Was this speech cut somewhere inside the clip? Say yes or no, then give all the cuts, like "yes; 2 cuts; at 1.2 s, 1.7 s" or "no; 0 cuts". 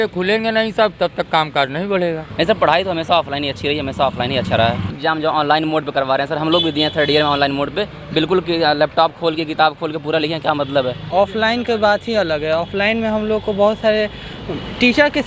yes; 3 cuts; at 2.2 s, 5.0 s, 11.0 s